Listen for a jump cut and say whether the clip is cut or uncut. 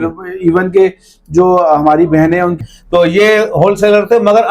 cut